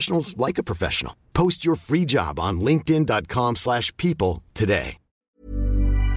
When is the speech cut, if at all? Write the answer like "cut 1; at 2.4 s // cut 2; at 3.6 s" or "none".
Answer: cut 1; at 5.2 s